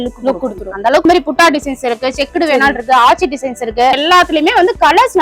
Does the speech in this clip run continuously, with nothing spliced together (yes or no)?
no